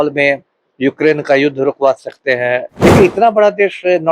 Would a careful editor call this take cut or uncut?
cut